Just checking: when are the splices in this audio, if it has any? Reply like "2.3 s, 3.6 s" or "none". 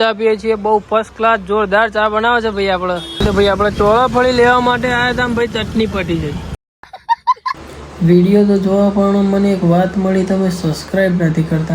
3.2 s, 7.7 s